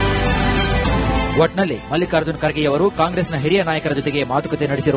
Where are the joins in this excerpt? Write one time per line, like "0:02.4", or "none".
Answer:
0:01.1